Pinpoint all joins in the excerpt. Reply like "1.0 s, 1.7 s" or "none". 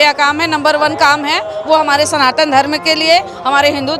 none